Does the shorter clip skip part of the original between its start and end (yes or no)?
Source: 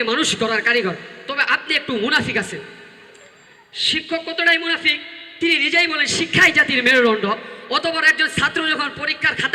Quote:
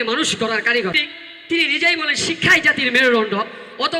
yes